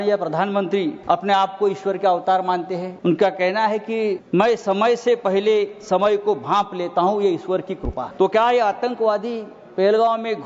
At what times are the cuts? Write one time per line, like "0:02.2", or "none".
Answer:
0:01.0
0:02.9
0:04.2
0:08.0